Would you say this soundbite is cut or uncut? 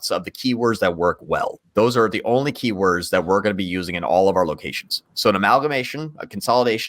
cut